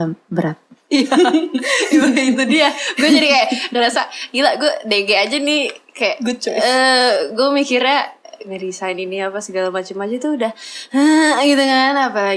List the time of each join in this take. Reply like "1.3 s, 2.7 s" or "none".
none